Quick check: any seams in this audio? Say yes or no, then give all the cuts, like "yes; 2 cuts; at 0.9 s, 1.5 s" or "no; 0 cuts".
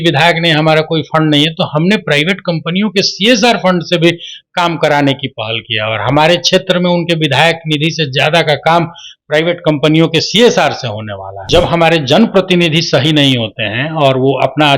yes; 1 cut; at 11.4 s